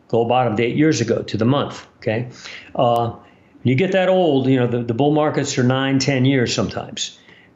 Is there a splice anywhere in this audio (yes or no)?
no